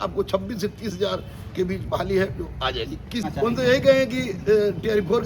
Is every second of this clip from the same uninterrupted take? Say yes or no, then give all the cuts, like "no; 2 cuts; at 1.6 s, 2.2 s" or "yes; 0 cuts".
no; 1 cut; at 3.3 s